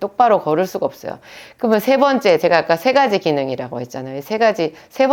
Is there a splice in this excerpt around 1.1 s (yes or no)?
no